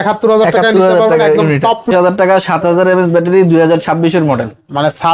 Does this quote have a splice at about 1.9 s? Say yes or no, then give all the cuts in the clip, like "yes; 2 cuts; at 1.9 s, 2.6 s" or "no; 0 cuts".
yes; 1 cut; at 1.9 s